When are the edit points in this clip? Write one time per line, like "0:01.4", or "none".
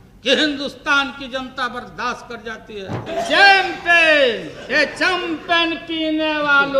0:03.1